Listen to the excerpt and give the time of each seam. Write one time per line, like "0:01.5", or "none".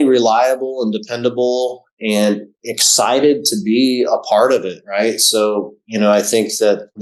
none